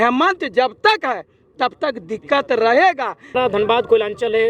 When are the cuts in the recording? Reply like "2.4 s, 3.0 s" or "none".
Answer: 3.3 s

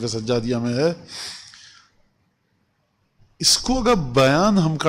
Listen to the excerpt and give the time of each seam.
none

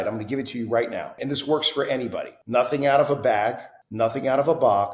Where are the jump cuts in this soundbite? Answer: 1.2 s, 2.4 s

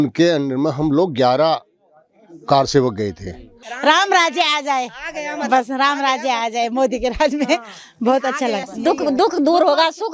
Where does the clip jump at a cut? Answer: 3.7 s, 8.7 s

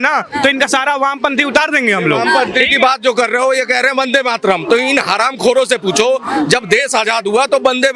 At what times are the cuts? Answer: none

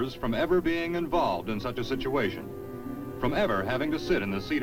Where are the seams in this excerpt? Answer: 1.6 s

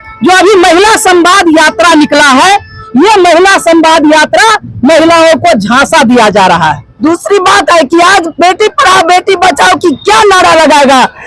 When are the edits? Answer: 6.8 s

